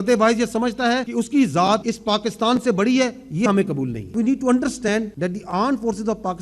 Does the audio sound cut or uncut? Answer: cut